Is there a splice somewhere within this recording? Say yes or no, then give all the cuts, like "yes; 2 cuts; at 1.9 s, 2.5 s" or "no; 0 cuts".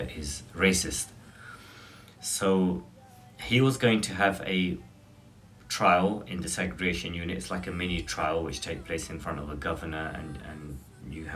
no; 0 cuts